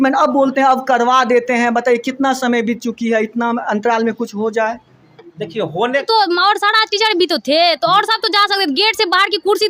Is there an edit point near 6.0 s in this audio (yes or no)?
yes